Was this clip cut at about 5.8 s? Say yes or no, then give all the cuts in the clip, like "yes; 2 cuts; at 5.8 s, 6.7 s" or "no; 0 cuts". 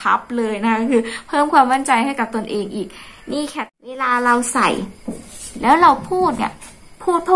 no; 1 cut; at 3.3 s